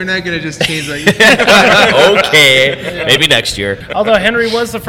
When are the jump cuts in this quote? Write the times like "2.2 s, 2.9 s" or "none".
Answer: 3.8 s

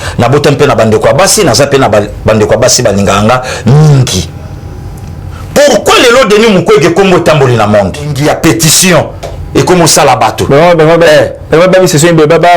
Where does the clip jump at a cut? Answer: 8.1 s

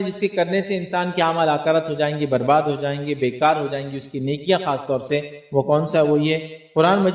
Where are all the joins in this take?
none

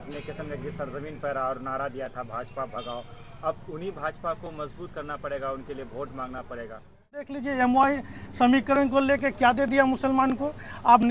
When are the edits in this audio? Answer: 7.4 s

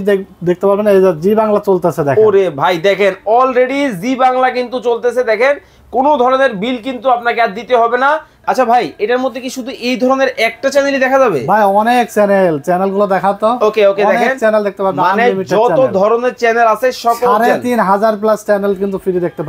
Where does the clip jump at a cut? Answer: 8.3 s

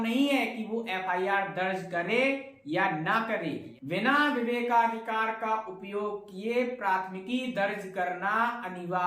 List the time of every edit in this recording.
3.7 s

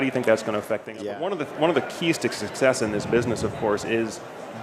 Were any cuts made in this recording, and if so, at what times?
1.0 s

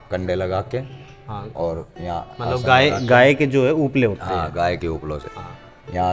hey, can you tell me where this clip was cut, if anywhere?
none

